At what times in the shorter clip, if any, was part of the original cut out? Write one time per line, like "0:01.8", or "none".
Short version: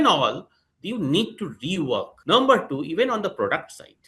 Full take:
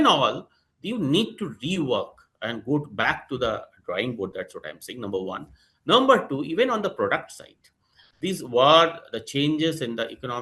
0:02.1

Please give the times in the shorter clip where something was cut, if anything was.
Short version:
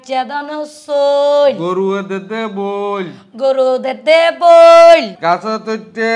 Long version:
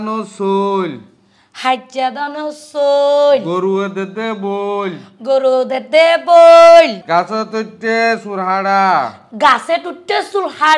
none

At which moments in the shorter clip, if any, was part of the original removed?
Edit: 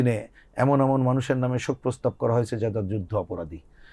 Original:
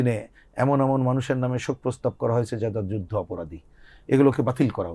none

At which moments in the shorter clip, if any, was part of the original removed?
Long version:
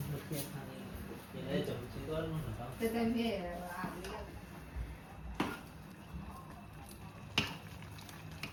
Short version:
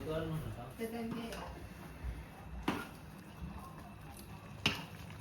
0:01.6

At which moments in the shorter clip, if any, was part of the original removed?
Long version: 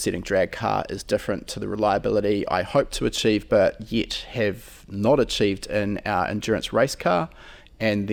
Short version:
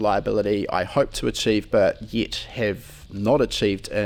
none

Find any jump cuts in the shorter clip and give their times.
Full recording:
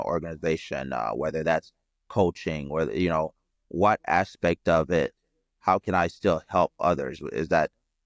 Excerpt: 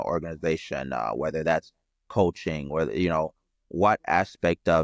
none

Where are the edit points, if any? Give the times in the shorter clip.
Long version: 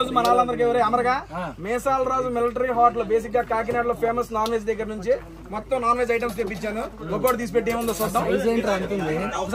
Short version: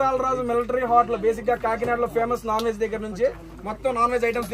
none

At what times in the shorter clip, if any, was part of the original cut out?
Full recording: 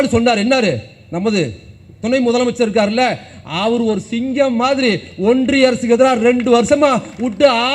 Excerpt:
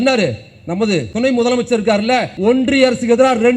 0:01.1
0:02.3

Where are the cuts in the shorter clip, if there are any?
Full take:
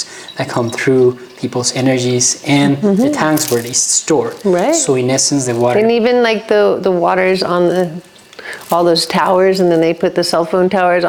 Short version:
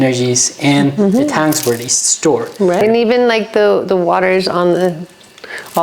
0:02.8

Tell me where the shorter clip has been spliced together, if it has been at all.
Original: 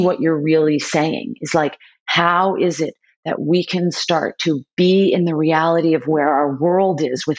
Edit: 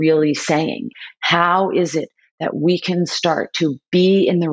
0:00.9

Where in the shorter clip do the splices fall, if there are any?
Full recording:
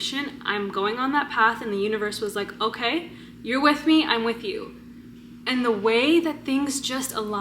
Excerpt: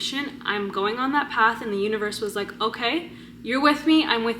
none

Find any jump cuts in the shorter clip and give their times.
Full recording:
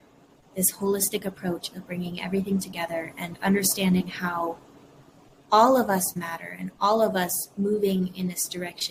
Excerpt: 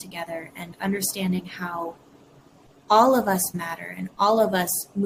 none

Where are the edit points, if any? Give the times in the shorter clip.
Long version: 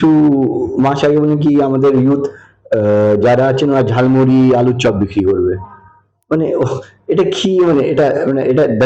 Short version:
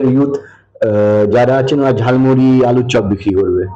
none

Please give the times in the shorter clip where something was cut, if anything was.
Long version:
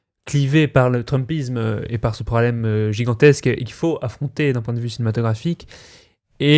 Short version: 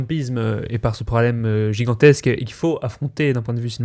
none

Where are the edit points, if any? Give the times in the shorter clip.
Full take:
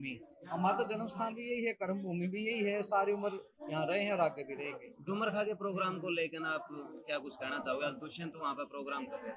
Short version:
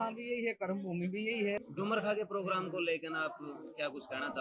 0:01.6

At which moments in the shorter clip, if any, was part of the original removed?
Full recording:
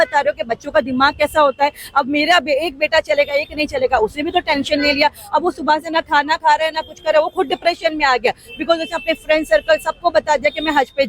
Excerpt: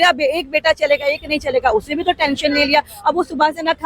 none

